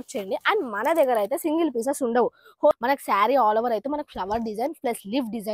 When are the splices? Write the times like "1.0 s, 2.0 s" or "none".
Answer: 2.7 s